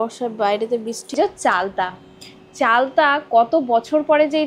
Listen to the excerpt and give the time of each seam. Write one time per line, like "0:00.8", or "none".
0:01.1